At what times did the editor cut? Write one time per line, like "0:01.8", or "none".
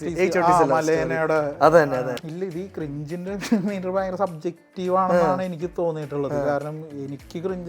0:02.2